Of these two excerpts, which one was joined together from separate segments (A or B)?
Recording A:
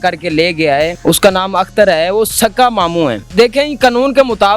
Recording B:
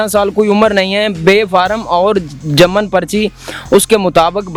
A